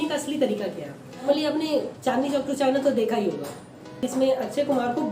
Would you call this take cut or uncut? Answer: cut